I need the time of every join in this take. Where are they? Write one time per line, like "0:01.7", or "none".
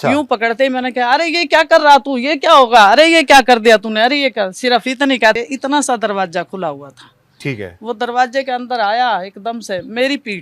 0:05.4